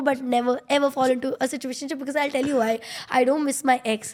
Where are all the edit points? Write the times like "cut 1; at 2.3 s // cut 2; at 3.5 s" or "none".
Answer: none